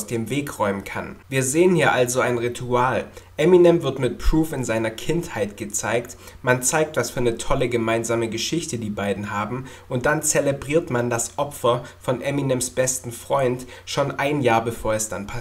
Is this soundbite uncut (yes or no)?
yes